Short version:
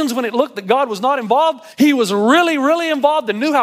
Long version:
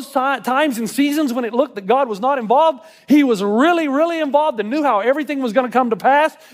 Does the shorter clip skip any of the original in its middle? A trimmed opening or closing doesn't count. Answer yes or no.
yes